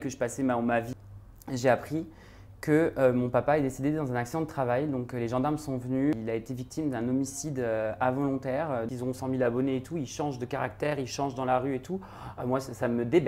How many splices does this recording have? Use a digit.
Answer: 3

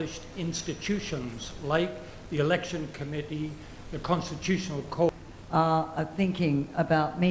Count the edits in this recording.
1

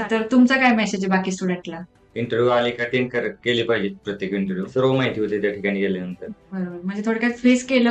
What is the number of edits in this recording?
1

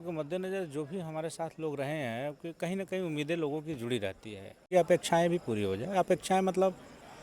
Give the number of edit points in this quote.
1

